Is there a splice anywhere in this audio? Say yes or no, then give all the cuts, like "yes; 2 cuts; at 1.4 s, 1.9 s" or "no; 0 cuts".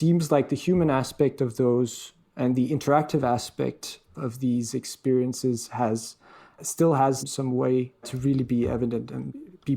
yes; 1 cut; at 8.1 s